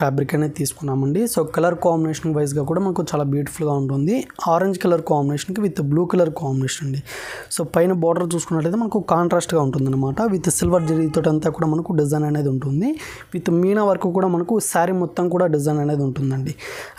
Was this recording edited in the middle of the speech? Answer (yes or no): no